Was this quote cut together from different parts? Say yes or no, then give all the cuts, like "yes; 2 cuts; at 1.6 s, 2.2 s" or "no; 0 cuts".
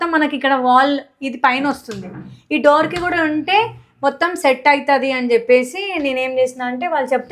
no; 0 cuts